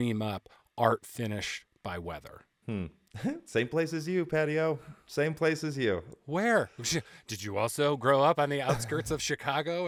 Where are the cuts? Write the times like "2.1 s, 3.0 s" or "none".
none